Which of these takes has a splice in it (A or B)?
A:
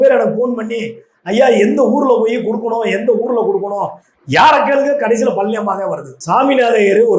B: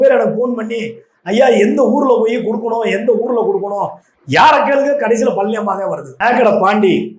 A